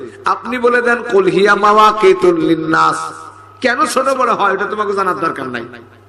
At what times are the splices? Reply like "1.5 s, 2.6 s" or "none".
none